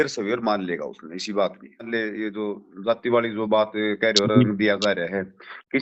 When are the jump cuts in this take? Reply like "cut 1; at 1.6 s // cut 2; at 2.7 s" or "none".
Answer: cut 1; at 1.9 s